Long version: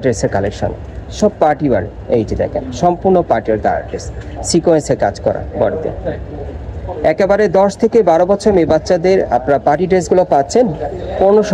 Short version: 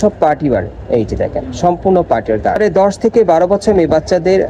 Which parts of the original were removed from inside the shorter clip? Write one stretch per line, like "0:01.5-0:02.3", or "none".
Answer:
0:03.8-0:07.4